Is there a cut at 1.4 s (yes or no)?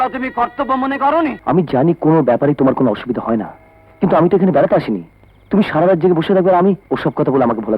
yes